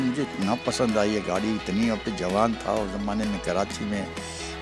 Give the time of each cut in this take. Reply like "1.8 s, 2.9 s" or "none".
none